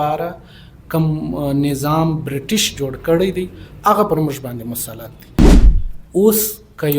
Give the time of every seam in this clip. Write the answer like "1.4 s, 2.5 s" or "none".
5.6 s